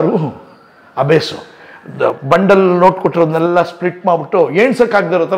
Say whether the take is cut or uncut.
uncut